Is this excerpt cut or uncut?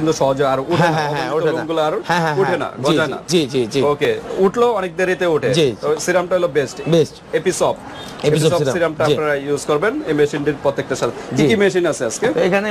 uncut